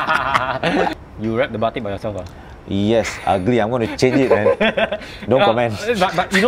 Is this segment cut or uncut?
cut